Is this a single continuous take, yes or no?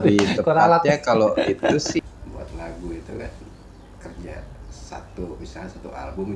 no